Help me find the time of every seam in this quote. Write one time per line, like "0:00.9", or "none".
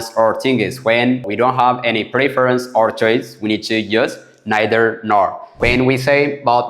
0:01.3
0:05.6